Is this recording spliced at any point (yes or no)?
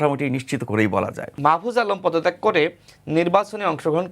yes